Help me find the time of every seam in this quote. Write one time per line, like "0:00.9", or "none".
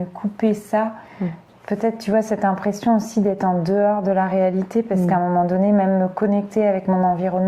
0:01.4